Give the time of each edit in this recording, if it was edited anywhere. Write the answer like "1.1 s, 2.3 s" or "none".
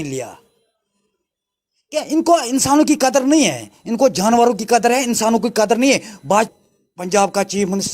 6.5 s